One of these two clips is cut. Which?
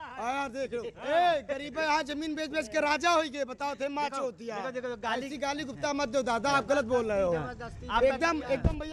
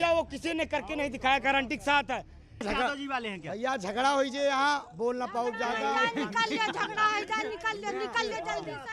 second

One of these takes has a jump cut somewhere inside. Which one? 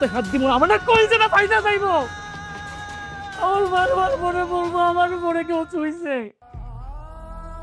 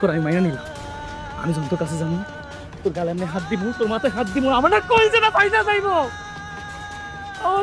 first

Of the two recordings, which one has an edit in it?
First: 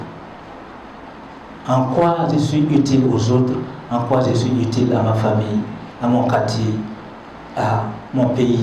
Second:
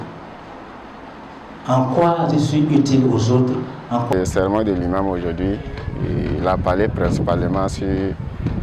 second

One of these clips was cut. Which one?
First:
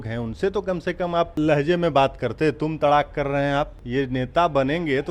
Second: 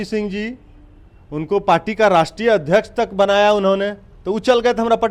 first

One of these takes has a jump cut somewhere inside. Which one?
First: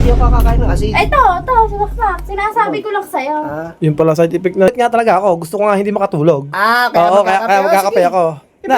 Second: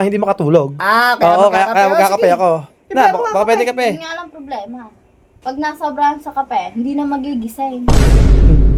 first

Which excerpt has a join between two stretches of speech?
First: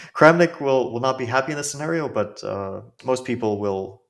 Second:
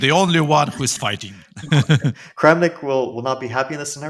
first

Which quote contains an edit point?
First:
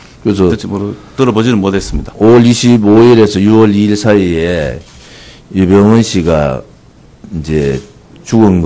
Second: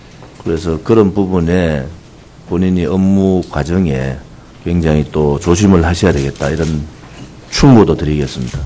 first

